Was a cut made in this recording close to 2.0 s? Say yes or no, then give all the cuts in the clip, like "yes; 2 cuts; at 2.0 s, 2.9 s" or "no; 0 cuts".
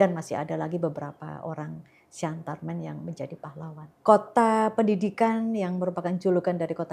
no; 1 cut; at 3.9 s